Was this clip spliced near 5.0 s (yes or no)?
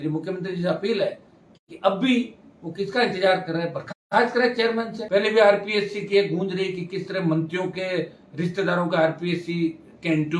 yes